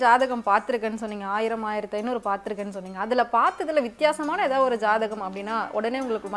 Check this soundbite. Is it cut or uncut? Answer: uncut